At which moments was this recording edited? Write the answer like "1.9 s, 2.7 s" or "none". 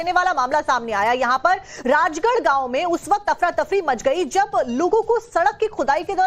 0.9 s